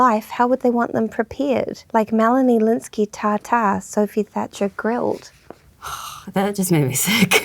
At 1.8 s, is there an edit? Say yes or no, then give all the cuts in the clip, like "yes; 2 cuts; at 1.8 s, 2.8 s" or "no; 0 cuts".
yes; 1 cut; at 1.8 s